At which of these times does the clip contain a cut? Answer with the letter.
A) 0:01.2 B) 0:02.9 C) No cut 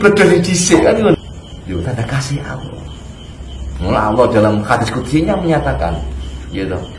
A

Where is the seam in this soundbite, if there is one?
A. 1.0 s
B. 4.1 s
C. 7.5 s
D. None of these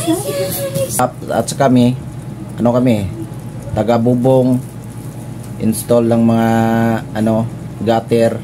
A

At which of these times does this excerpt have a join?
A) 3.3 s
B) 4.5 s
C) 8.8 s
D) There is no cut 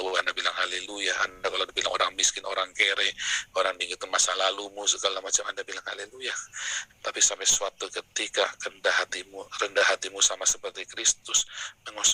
D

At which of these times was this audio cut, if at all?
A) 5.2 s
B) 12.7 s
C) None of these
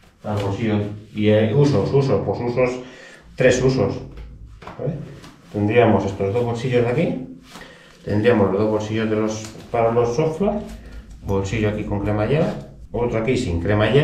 B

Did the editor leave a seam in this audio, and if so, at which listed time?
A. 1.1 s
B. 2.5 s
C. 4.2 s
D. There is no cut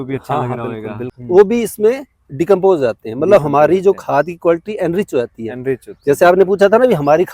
A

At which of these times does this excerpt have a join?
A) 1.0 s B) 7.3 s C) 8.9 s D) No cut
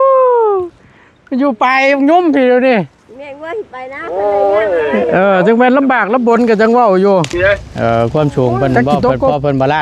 B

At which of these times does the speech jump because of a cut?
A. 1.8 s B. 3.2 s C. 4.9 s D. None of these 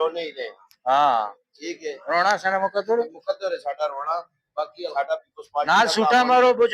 C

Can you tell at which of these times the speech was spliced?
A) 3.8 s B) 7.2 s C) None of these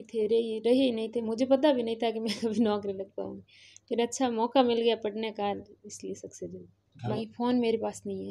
B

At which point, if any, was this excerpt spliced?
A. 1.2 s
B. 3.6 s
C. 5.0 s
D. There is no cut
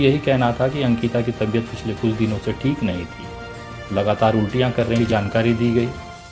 C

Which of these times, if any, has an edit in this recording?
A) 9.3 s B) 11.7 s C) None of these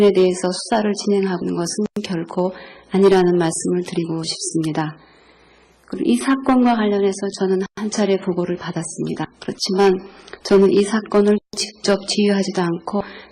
B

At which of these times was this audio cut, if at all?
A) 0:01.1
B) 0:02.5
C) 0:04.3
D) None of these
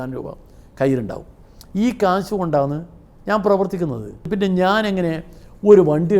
C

